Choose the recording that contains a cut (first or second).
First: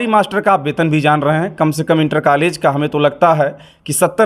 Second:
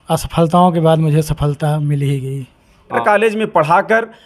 second